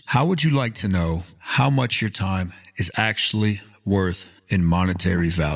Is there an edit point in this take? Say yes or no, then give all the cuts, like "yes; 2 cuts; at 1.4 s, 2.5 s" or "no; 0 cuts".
yes; 1 cut; at 4.3 s